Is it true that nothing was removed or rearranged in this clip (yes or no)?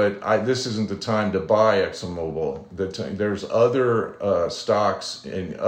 yes